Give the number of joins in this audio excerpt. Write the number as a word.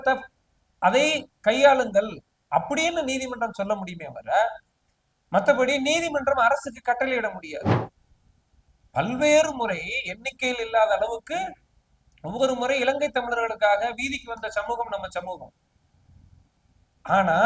one